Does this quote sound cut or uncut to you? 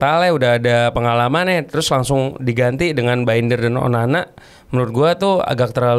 uncut